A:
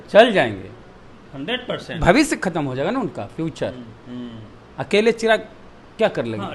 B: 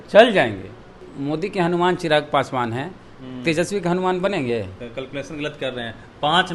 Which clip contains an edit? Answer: B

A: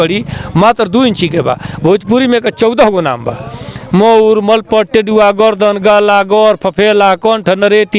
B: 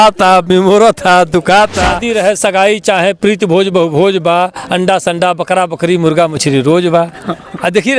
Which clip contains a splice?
B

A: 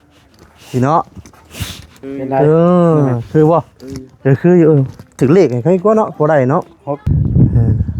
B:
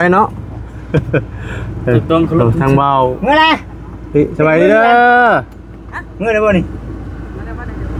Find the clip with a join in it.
A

